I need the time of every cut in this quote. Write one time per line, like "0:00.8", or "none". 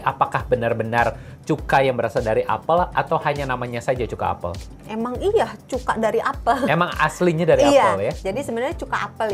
none